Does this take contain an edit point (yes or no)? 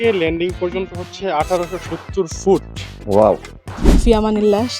yes